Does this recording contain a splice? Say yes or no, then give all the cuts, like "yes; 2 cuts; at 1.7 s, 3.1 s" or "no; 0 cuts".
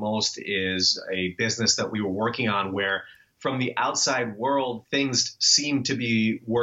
yes; 1 cut; at 4.8 s